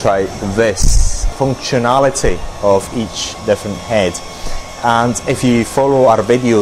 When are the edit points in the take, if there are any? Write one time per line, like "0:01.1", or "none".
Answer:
0:01.2